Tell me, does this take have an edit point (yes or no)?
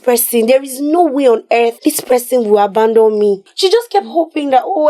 yes